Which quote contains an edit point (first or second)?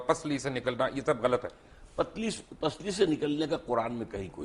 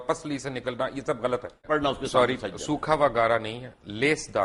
second